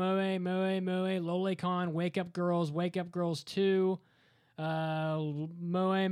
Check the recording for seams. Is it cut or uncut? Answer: uncut